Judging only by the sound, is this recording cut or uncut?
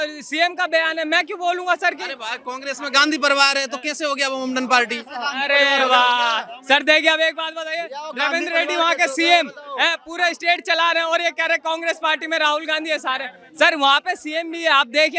uncut